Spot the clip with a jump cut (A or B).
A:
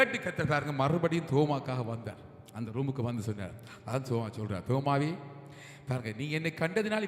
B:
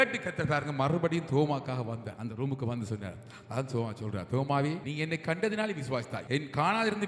B